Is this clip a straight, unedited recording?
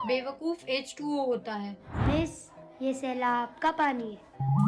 no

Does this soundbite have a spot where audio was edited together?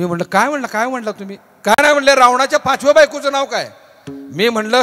no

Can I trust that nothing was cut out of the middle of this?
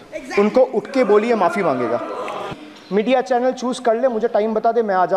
no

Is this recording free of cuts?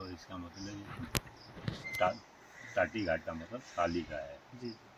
yes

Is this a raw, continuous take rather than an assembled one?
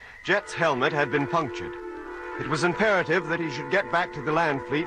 yes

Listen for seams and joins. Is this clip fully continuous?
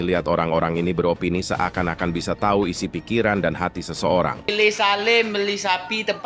no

